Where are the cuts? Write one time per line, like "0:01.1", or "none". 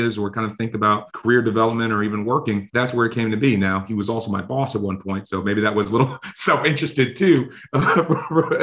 0:01.1
0:02.7